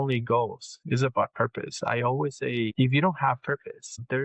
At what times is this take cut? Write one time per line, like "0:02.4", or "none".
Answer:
0:02.7